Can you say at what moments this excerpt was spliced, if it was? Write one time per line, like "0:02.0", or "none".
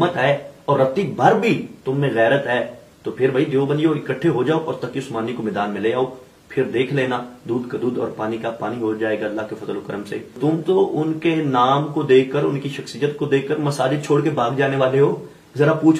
0:10.4